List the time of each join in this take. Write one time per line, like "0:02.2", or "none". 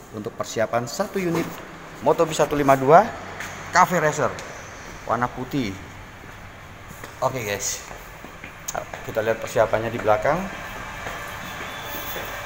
none